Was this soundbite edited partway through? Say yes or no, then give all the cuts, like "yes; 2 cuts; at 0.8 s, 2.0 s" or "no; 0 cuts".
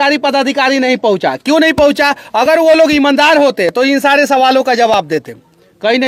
no; 0 cuts